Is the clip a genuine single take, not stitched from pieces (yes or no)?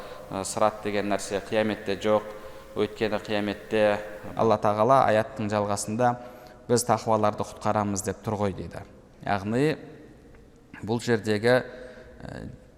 no